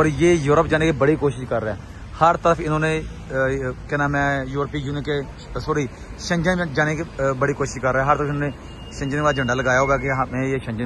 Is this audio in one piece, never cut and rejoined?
yes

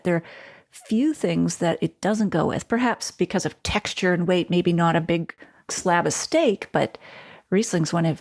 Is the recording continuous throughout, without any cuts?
yes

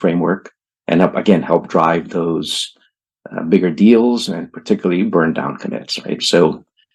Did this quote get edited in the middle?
no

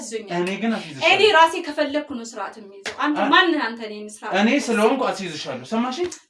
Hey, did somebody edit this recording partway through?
no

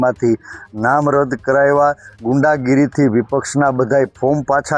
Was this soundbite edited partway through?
yes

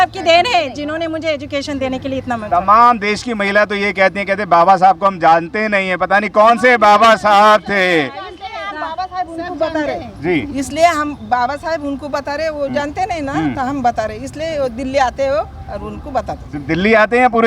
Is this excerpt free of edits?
yes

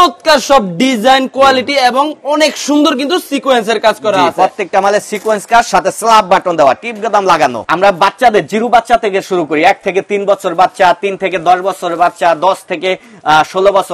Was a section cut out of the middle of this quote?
no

